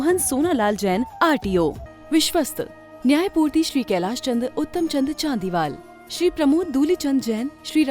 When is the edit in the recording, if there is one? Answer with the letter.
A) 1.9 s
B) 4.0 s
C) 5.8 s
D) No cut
A